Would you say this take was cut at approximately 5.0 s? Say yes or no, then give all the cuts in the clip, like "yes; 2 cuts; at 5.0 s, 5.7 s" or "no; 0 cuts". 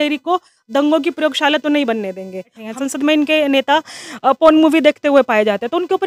no; 1 cut; at 2.6 s